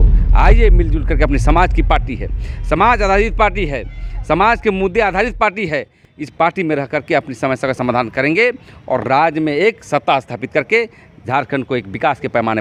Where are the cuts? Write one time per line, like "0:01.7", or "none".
none